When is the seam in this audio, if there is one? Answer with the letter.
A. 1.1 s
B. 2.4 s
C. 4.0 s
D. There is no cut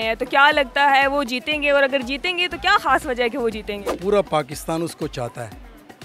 C